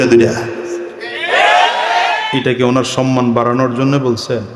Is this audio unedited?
no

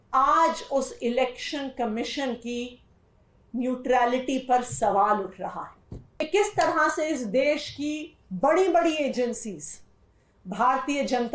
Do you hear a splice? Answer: yes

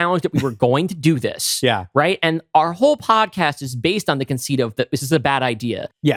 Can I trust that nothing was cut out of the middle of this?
yes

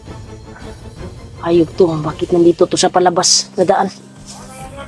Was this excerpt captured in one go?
no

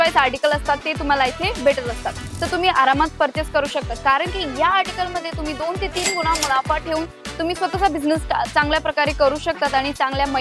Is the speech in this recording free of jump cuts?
no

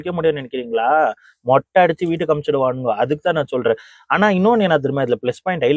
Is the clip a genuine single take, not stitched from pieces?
yes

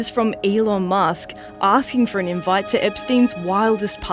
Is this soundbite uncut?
yes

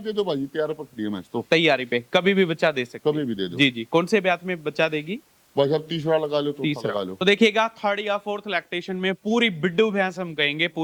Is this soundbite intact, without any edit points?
yes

